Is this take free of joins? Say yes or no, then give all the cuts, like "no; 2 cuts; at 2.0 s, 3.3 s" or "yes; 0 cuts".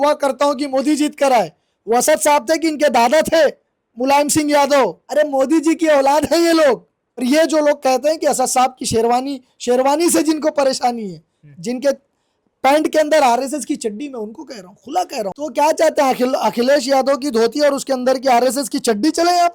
no; 3 cuts; at 5.0 s, 7.2 s, 15.4 s